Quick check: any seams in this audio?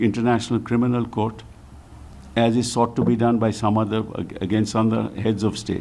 no; 0 cuts

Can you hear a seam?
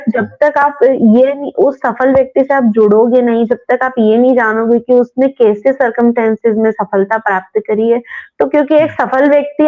no; 0 cuts

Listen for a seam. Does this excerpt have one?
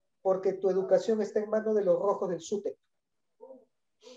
no; 0 cuts

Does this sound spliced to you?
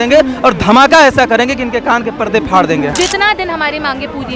yes; 1 cut; at 2.9 s

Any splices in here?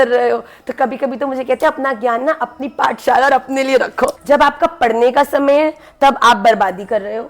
yes; 1 cut; at 4.2 s

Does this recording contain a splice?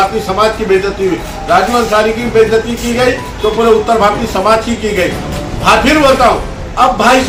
no; 0 cuts

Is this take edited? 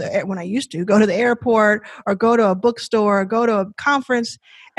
yes; 1 cut; at 3.8 s

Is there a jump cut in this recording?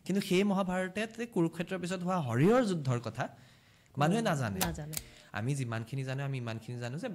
yes; 1 cut; at 5.0 s

